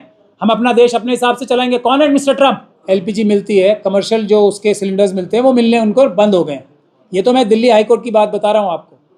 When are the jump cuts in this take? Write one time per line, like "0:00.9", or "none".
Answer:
0:02.8